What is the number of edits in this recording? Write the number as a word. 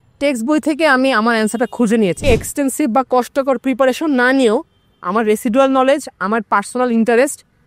one